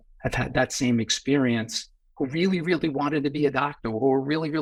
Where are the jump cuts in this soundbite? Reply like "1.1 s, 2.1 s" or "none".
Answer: none